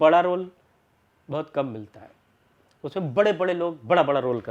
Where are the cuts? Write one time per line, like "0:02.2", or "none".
none